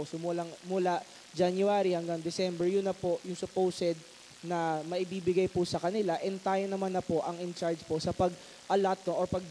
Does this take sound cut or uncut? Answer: uncut